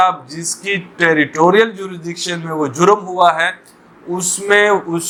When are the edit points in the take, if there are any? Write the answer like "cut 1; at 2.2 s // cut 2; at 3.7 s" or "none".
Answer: none